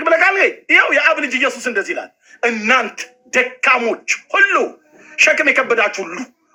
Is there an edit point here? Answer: no; 0 cuts

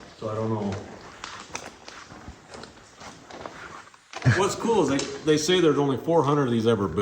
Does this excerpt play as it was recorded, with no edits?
no; 1 cut; at 4.2 s

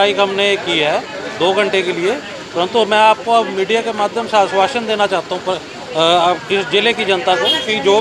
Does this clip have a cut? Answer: no; 0 cuts

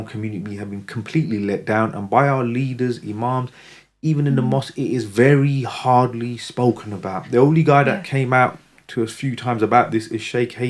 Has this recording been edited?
no; 0 cuts

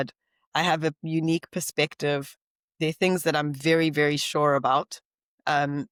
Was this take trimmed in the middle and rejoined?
no; 0 cuts

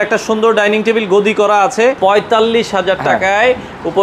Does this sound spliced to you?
yes; 1 cut; at 2.0 s

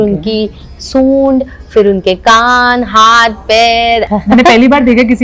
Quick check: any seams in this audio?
yes; 1 cut; at 4.1 s

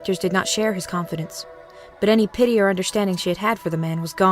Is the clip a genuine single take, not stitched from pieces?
no; 1 cut; at 1.2 s

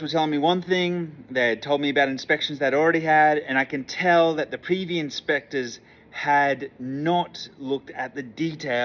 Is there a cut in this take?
no; 0 cuts

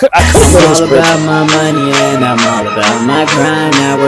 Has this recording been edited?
yes; 1 cut; at 1.1 s

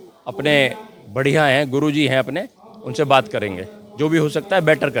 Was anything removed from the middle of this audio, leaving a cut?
no; 0 cuts

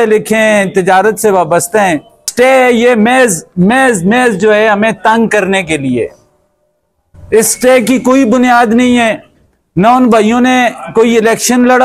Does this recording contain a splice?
yes; 1 cut; at 2.2 s

